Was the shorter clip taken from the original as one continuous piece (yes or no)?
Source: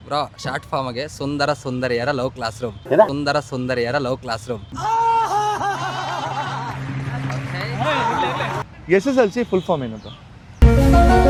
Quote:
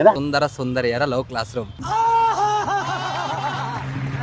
yes